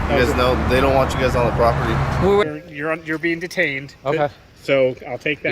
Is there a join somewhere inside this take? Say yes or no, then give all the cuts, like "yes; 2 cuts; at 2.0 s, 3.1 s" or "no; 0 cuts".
yes; 1 cut; at 2.4 s